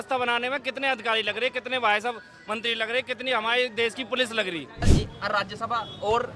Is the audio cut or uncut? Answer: cut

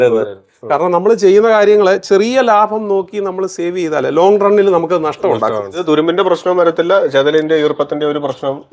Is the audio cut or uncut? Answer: cut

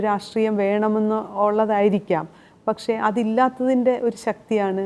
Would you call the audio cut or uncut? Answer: uncut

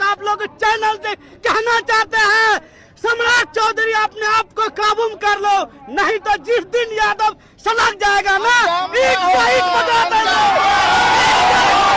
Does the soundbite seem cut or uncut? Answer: uncut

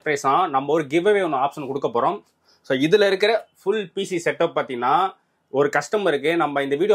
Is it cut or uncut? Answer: uncut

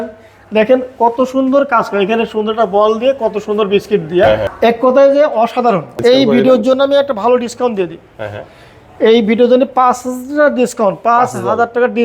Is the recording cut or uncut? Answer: cut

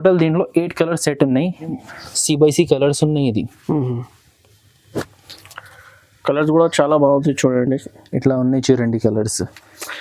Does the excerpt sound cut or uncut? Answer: cut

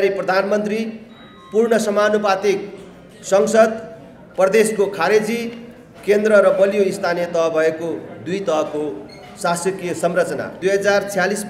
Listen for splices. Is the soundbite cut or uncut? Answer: cut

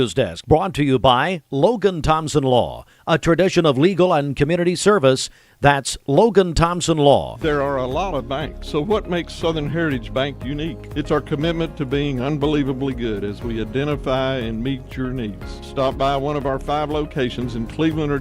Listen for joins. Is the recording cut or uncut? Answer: cut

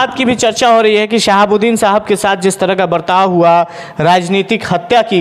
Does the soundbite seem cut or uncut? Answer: uncut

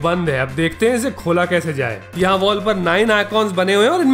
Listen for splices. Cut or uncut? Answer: cut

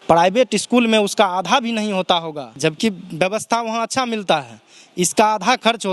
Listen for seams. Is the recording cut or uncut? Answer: uncut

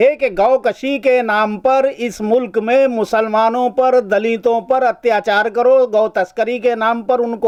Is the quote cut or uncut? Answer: uncut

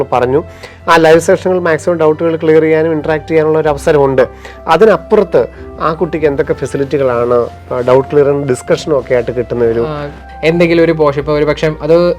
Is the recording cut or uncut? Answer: cut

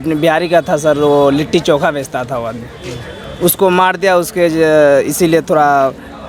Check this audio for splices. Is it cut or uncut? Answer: uncut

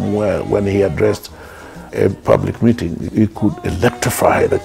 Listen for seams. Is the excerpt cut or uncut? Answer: uncut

